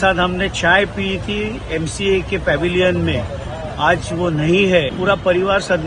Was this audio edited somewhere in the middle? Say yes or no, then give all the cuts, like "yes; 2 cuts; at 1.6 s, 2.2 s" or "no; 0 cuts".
yes; 1 cut; at 4.9 s